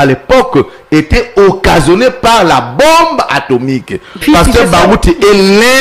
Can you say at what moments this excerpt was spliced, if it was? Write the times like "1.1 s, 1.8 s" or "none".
4.2 s